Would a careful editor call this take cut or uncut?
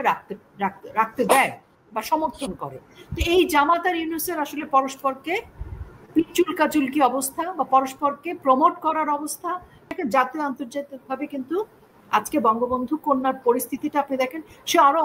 cut